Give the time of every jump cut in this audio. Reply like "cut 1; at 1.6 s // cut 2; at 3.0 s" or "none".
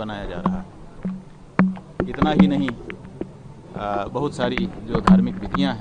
none

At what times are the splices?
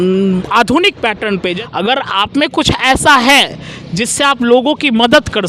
cut 1; at 1.6 s

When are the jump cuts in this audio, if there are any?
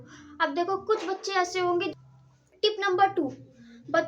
cut 1; at 1.9 s

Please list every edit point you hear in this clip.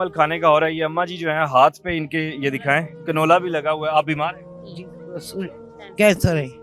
none

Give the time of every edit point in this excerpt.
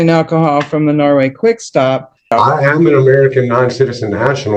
cut 1; at 2.3 s

